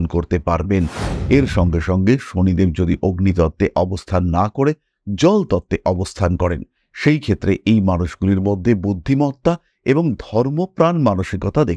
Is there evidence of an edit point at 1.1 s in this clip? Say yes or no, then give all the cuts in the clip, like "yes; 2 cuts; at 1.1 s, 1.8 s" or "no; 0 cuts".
yes; 1 cut; at 1.1 s